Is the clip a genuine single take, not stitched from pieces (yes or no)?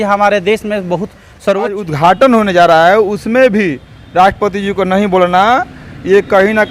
no